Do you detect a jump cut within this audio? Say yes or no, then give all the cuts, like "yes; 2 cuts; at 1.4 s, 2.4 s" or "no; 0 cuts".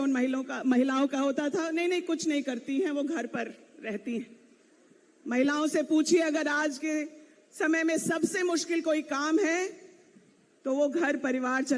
no; 0 cuts